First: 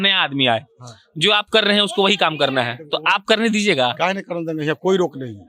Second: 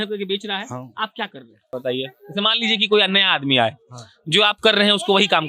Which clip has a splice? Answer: second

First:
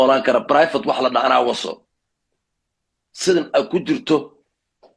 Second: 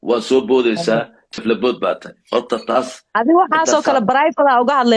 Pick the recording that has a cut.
second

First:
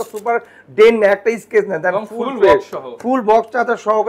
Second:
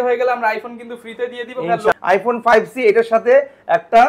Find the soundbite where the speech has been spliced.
second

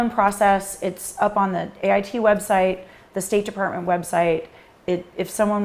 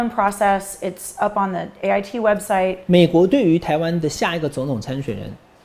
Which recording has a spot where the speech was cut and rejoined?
second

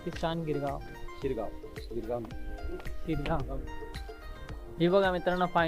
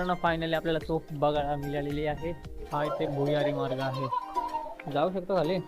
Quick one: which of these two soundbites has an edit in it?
second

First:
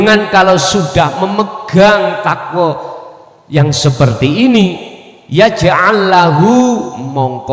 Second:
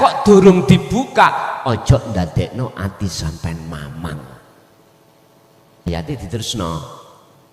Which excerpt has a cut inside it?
second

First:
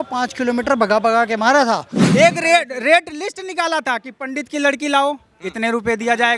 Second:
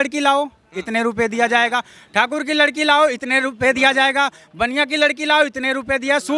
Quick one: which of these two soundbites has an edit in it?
first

